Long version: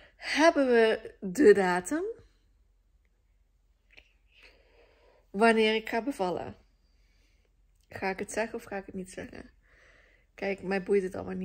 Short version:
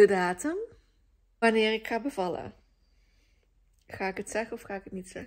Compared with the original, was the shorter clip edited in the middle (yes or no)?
yes